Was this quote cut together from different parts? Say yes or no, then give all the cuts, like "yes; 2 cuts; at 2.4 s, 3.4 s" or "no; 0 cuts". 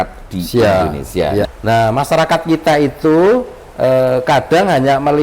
yes; 1 cut; at 1.5 s